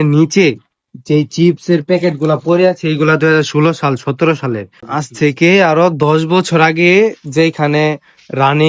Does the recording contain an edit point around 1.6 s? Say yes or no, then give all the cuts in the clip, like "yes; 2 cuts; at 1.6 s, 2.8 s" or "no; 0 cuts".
no; 1 cut; at 4.8 s